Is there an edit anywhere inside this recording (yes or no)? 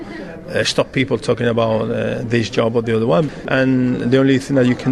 yes